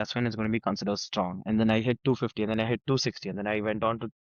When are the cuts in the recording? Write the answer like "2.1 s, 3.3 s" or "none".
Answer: none